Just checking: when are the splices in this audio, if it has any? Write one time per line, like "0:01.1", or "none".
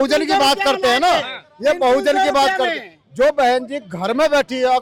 none